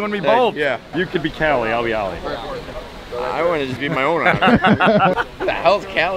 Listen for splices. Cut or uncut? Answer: cut